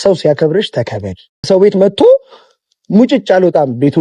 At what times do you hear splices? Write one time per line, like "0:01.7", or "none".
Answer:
0:01.5